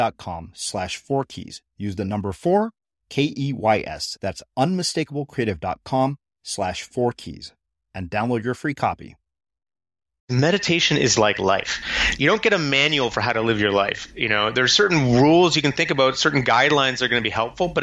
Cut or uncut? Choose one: cut